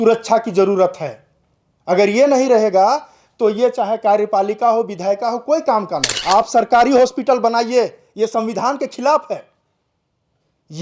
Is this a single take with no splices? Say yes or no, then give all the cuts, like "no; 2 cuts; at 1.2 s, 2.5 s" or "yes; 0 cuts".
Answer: no; 1 cut; at 6.1 s